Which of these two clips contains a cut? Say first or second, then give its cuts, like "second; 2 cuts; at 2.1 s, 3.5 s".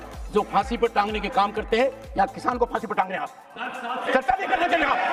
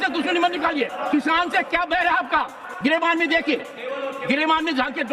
second; 2 cuts; at 1.0 s, 2.6 s